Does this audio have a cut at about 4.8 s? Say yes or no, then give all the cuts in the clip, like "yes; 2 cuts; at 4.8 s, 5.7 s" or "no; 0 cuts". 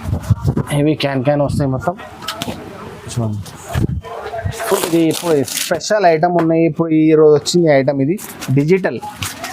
yes; 1 cut; at 4.8 s